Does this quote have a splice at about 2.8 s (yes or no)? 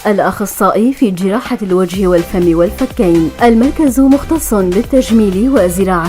yes